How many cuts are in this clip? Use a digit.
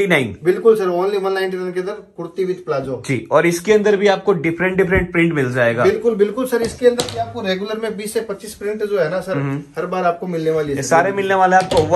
0